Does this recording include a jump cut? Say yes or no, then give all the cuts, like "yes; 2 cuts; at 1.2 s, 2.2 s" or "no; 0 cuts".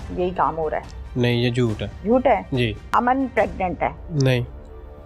yes; 3 cuts; at 1.9 s, 2.8 s, 4.0 s